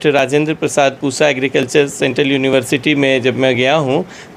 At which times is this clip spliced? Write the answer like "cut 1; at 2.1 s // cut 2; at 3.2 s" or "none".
none